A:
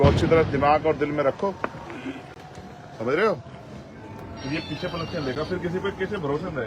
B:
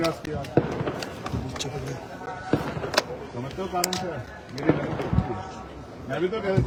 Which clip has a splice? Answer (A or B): A